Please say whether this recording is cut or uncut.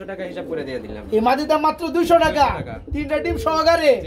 uncut